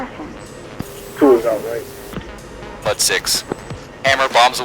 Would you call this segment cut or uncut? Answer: cut